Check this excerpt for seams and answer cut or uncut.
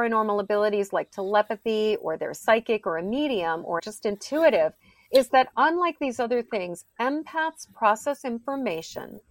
cut